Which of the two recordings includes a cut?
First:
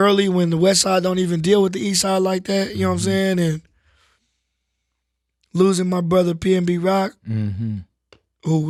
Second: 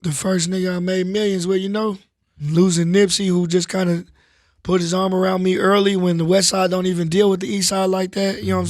second; 1 cut; at 2.4 s

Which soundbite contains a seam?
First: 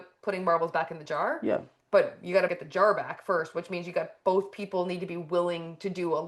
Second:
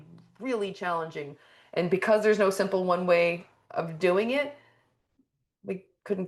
first; 1 cut; at 2.5 s

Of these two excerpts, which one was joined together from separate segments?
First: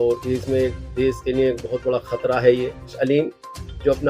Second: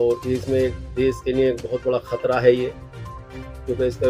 first; 1 cut; at 2.9 s

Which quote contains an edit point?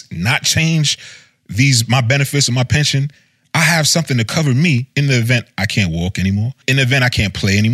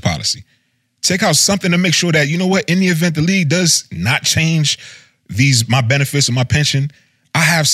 first; 1 cut; at 6.6 s

